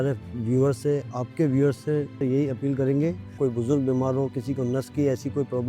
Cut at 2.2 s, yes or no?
yes